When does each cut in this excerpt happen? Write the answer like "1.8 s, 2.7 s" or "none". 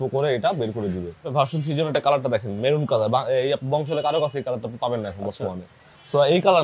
1.3 s

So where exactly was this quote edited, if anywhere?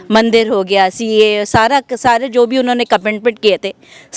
none

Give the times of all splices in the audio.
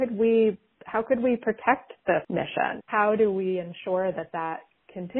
2.9 s

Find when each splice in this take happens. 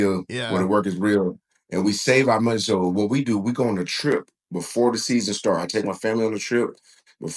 none

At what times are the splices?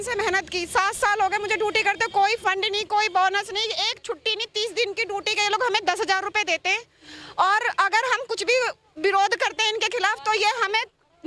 none

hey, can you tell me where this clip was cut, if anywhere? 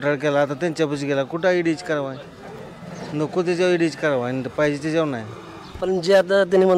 none

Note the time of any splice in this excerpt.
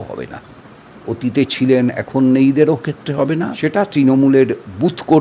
0.9 s, 3.5 s

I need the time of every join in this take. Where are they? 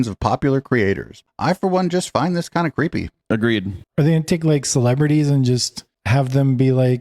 1.3 s, 3.8 s

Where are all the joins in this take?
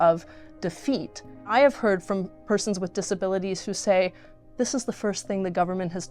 1.5 s

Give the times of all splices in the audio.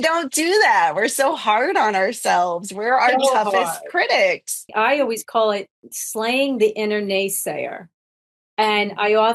4.7 s

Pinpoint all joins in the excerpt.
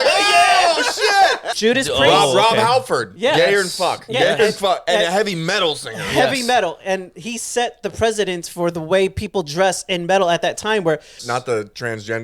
1.5 s, 11.2 s

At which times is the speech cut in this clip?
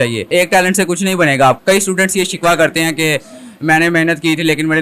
1.6 s

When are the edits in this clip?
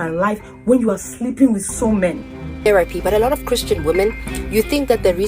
2.7 s

